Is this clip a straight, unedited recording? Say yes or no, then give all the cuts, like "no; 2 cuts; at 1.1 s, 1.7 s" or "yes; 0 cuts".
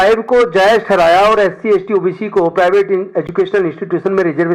yes; 0 cuts